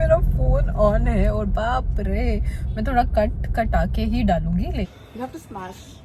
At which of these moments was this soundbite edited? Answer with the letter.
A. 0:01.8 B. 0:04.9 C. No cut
B